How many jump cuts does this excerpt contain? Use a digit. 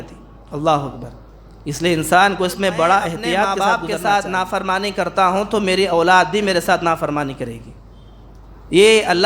1